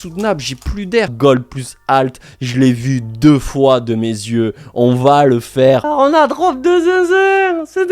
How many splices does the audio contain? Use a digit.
2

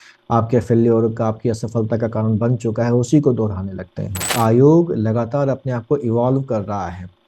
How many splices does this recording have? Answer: 1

